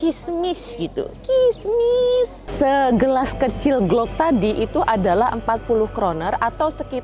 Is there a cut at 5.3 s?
no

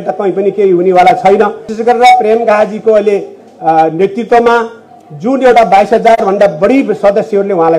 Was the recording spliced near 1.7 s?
yes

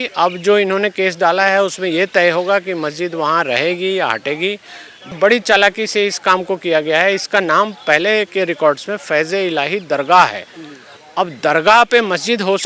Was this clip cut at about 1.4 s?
no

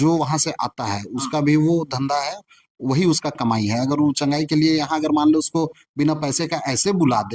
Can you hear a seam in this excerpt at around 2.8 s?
no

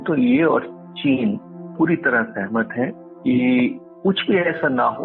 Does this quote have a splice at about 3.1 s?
yes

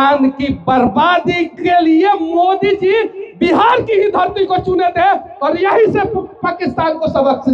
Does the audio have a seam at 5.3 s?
no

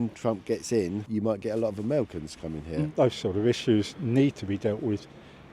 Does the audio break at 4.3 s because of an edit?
no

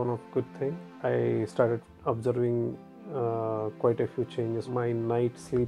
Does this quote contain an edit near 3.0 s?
no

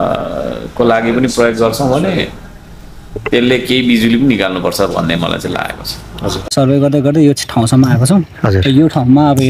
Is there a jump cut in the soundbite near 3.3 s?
no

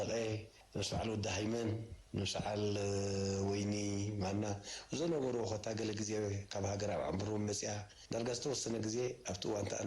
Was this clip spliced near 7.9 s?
yes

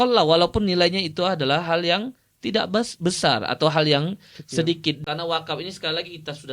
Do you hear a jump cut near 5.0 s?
yes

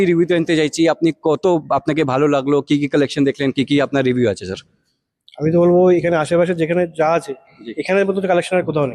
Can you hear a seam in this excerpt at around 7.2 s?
no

